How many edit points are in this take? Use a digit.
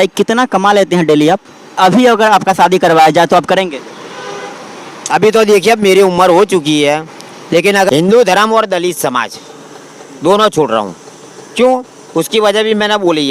2